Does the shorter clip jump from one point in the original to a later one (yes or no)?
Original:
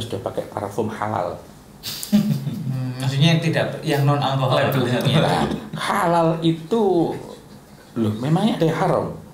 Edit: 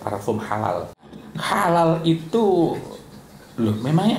yes